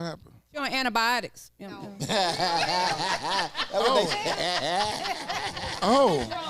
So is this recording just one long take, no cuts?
yes; 0 cuts

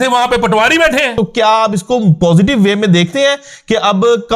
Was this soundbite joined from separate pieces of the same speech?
yes; 1 cut; at 1.1 s

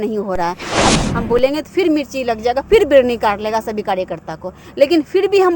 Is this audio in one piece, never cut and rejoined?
no; 1 cut; at 0.9 s

